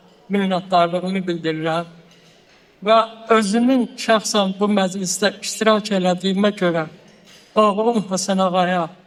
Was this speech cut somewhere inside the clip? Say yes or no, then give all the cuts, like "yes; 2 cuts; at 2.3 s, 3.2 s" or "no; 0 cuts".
no; 0 cuts